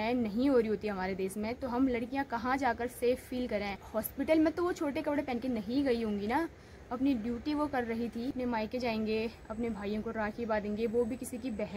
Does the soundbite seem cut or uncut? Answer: cut